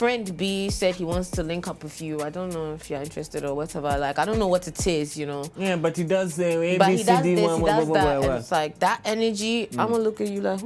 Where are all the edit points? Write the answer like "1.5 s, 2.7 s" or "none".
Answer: none